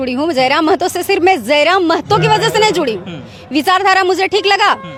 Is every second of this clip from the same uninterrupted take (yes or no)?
yes